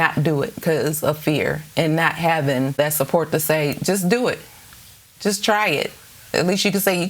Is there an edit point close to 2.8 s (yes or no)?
yes